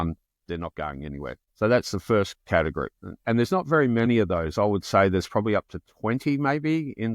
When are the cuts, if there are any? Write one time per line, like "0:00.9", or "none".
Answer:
0:01.4